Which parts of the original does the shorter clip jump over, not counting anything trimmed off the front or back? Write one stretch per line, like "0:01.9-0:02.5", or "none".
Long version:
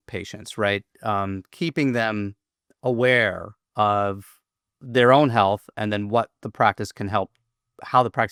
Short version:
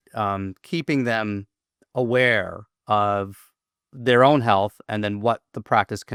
none